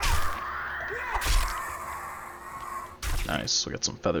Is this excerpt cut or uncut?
uncut